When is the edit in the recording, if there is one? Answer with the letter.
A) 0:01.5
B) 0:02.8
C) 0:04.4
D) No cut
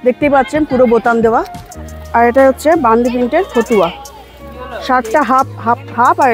D